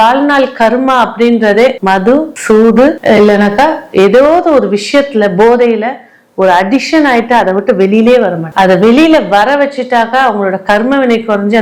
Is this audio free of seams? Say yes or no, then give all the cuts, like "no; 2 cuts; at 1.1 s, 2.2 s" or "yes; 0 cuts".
yes; 0 cuts